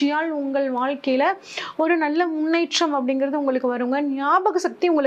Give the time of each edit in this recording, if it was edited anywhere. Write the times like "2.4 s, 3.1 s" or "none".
none